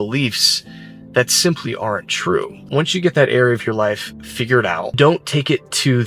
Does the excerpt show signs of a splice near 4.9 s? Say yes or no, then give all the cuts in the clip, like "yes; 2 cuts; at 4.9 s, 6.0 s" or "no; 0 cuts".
yes; 2 cuts; at 2.6 s, 4.9 s